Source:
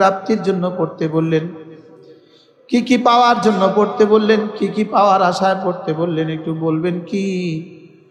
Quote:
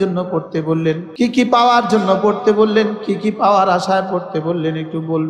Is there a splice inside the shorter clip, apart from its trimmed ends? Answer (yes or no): yes